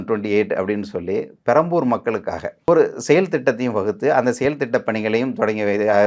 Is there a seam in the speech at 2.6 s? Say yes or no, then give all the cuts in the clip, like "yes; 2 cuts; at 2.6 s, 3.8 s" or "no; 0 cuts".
yes; 1 cut; at 2.6 s